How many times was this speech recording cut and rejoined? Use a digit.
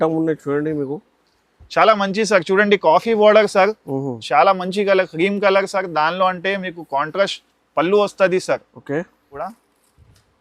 1